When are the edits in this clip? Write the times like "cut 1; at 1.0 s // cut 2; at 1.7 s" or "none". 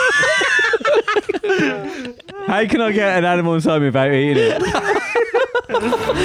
none